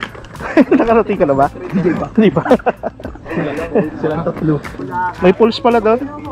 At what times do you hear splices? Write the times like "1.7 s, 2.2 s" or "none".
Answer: 4.8 s